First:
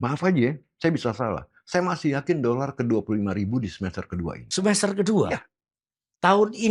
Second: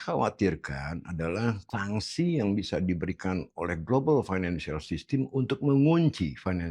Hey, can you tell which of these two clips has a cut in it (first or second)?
second